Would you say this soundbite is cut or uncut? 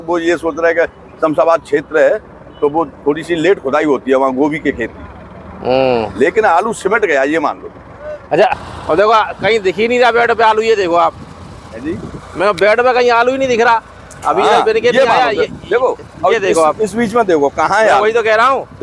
cut